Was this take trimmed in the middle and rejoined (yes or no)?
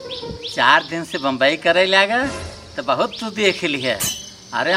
no